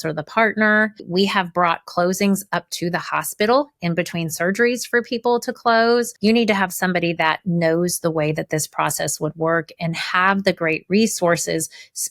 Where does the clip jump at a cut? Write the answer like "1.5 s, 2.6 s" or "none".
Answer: 1.0 s, 6.1 s